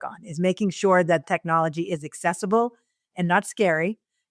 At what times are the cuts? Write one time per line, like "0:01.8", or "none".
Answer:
0:01.2

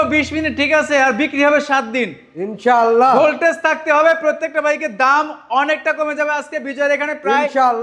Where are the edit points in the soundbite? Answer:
none

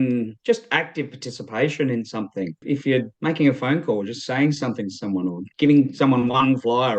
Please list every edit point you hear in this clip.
0:02.6
0:05.5

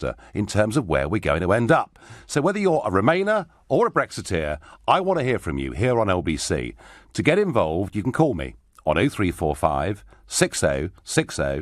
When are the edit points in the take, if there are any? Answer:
0:07.5

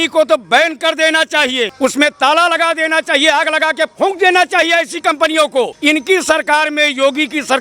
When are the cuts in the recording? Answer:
0:01.7
0:05.7

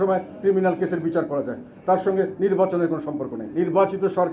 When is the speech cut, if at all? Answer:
0:03.4

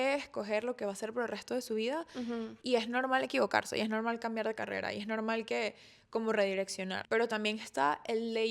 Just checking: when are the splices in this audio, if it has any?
0:07.0

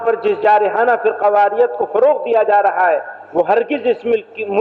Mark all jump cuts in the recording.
none

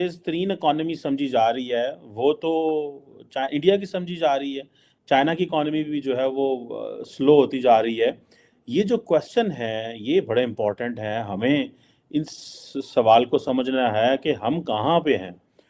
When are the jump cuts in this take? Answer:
none

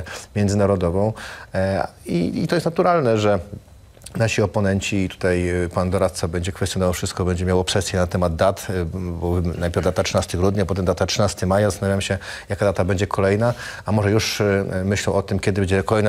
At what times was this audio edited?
none

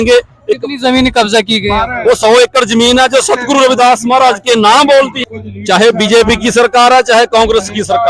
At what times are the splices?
0:05.4

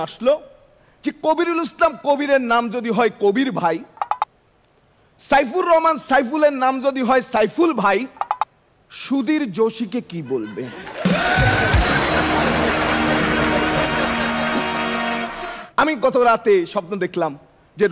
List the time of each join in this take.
0:15.6

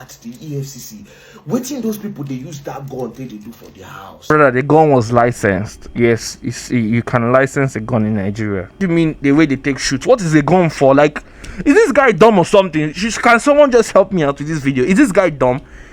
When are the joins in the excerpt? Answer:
0:08.8

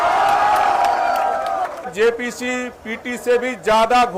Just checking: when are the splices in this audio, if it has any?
0:01.9

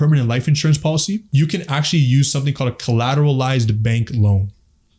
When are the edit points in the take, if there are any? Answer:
0:01.3

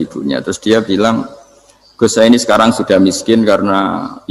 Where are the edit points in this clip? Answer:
none

